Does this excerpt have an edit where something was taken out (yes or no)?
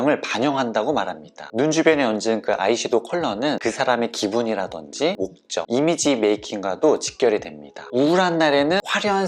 yes